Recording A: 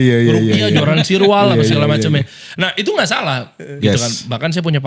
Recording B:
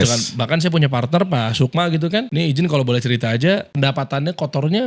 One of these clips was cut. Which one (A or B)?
B